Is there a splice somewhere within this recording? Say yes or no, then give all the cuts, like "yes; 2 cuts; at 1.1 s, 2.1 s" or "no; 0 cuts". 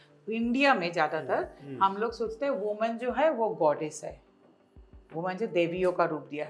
no; 0 cuts